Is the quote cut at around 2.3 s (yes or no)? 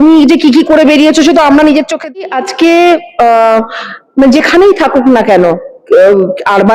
yes